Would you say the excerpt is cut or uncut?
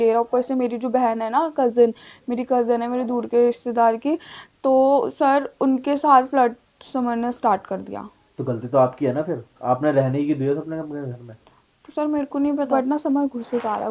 cut